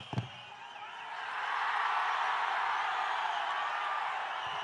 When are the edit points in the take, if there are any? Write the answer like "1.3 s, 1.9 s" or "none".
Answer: none